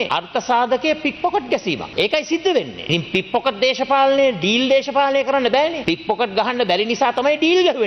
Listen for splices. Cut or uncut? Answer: uncut